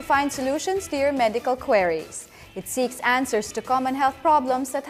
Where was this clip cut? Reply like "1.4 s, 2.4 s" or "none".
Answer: none